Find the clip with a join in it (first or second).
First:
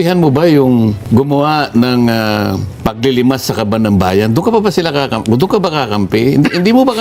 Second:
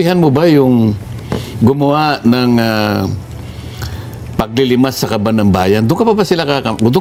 first